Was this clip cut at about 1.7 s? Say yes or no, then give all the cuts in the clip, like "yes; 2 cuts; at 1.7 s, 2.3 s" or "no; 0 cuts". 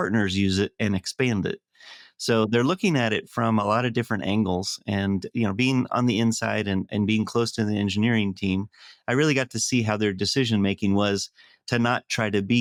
no; 0 cuts